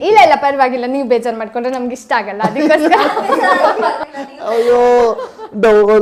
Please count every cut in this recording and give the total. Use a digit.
0